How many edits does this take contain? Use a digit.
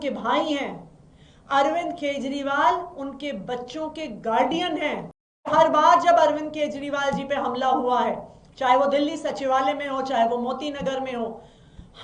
1